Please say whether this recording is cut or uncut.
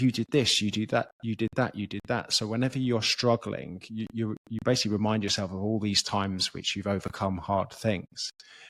uncut